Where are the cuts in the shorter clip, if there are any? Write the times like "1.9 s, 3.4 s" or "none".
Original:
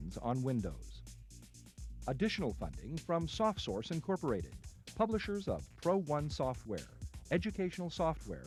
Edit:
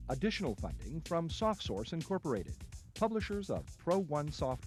none